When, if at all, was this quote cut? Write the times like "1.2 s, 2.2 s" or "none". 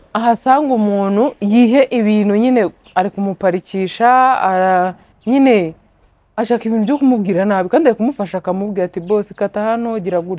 none